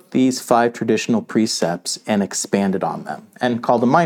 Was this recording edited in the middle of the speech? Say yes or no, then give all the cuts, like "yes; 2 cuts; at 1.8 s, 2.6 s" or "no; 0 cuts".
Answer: no; 0 cuts